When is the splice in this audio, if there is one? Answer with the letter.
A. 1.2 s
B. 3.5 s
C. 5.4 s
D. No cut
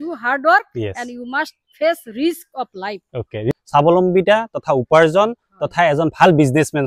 B